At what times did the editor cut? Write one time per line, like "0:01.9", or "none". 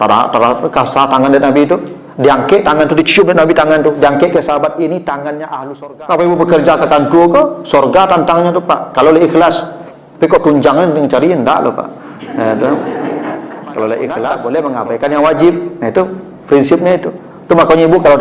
0:05.5
0:14.1